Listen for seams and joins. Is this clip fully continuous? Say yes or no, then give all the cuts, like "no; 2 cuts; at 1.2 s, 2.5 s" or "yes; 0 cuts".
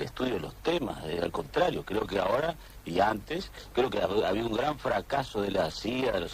no; 1 cut; at 3.2 s